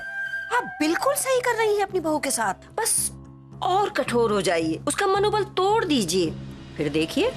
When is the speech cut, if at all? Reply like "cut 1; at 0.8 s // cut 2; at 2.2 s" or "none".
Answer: cut 1; at 2.7 s